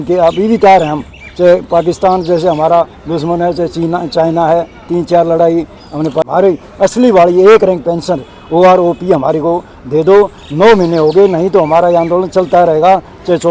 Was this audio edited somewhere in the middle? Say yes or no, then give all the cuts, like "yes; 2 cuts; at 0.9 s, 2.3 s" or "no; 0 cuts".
yes; 1 cut; at 6.3 s